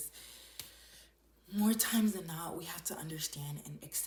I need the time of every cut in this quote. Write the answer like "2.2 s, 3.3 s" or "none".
none